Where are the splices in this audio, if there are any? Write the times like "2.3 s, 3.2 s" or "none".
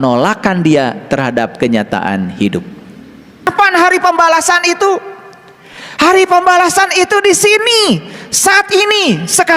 3.5 s